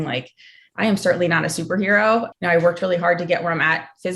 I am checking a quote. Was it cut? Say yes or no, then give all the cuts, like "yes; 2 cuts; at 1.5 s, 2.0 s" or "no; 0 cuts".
yes; 1 cut; at 2.3 s